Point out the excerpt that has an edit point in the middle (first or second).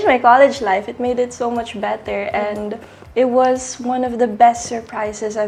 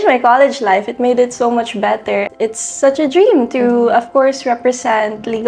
second